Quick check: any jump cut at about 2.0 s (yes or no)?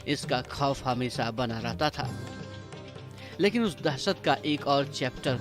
no